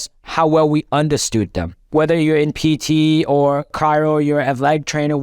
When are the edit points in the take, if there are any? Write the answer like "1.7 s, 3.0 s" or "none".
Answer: 1.9 s, 3.7 s